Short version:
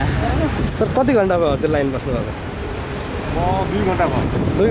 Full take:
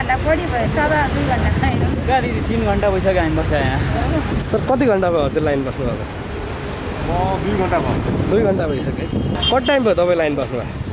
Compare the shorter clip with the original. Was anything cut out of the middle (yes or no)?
no